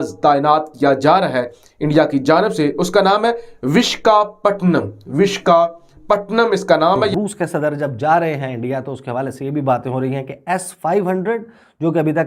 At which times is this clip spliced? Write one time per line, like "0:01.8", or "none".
0:07.1